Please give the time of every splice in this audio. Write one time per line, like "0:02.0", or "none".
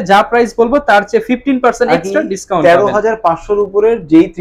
none